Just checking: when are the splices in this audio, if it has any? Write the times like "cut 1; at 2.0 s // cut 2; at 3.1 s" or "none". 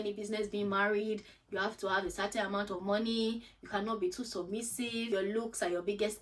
cut 1; at 5.1 s